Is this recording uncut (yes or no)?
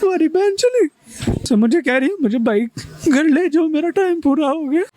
no